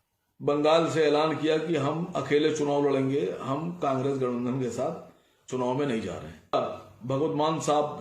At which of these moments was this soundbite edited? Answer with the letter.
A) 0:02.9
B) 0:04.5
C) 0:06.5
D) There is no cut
C